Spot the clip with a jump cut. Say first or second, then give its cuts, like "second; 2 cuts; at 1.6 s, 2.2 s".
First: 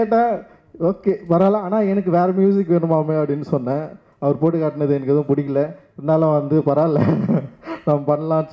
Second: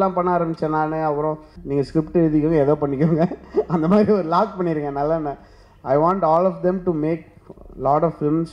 second; 1 cut; at 1.5 s